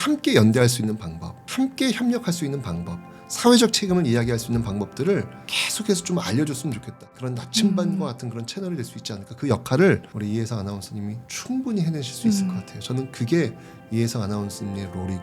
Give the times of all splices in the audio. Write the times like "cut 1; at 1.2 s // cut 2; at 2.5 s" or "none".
cut 1; at 7.0 s